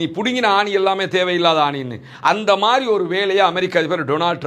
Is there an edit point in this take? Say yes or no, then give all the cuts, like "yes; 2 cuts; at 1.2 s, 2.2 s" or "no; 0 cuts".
no; 0 cuts